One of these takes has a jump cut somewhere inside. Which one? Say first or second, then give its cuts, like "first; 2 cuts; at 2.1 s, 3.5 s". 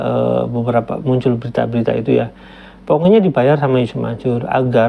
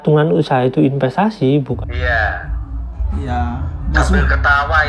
second; 1 cut; at 1.8 s